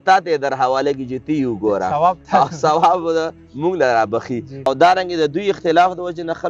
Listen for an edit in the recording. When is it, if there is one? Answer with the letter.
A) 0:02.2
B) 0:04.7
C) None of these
B